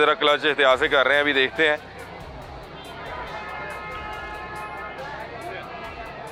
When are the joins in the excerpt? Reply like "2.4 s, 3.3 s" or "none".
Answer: none